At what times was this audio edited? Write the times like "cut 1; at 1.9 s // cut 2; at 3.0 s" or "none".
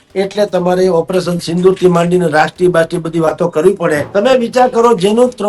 cut 1; at 4.0 s